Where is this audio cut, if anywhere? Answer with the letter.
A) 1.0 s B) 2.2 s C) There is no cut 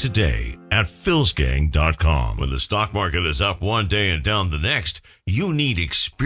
B